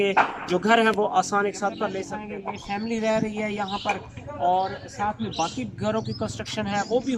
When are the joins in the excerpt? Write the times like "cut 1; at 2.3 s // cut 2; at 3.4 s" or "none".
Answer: cut 1; at 2.1 s